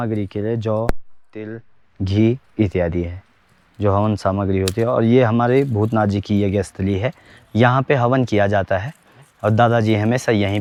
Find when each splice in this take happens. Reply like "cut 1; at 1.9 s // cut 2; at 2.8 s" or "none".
none

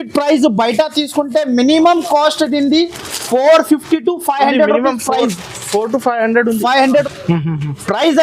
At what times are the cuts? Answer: cut 1; at 7.0 s

